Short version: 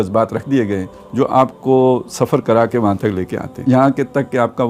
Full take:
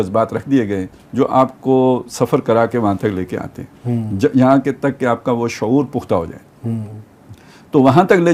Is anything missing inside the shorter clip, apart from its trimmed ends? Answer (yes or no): yes